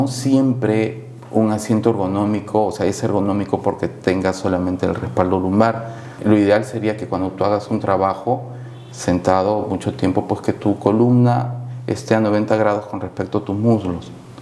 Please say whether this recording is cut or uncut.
cut